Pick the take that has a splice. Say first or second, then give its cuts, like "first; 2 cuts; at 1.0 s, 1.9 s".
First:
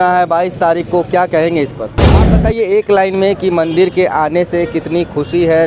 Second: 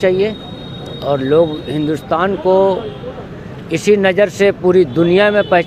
first; 1 cut; at 2.3 s